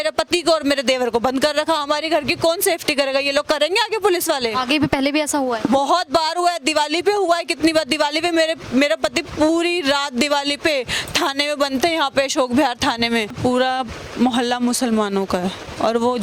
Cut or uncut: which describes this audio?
cut